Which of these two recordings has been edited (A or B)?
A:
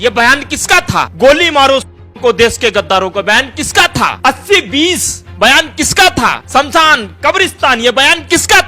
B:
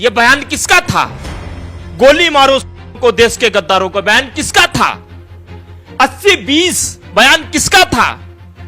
A